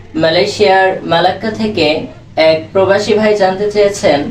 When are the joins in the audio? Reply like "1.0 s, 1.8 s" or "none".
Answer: 2.2 s